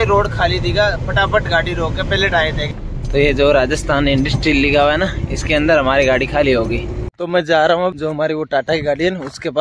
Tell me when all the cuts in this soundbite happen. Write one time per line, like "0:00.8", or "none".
0:02.7
0:07.1
0:08.0